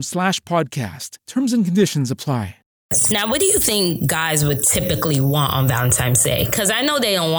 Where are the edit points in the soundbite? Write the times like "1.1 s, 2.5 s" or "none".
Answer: 3.0 s